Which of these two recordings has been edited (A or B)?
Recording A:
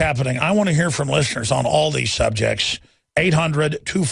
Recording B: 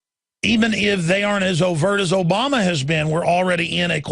B